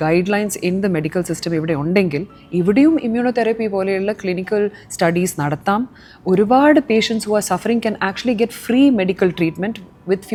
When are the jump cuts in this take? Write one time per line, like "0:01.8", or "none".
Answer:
none